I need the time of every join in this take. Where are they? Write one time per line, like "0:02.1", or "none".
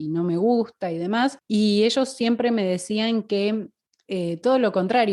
0:01.4